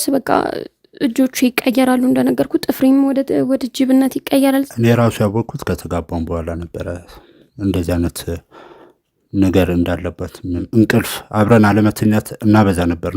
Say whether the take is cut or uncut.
cut